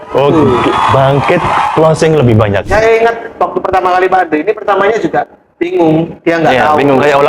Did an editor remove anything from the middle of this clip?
yes; 1 cut; at 2.7 s

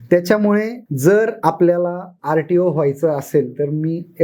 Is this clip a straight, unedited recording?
no; 2 cuts; at 1.2 s, 2.1 s

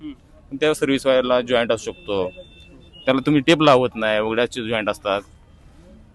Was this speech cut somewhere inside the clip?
no; 0 cuts

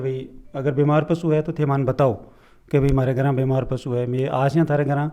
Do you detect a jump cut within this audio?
no; 0 cuts

